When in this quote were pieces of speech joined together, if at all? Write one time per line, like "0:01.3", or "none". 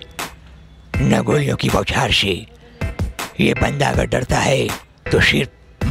none